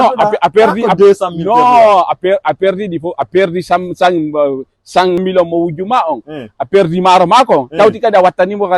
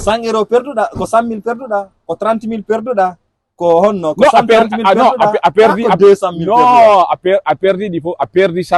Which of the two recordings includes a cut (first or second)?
first